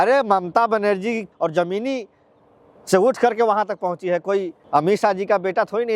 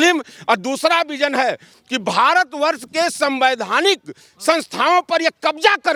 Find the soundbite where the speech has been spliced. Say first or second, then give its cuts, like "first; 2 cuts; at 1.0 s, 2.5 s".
first; 2 cuts; at 1.3 s, 4.6 s